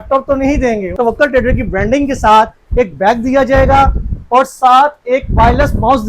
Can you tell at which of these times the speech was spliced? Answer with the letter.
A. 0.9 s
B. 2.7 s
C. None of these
A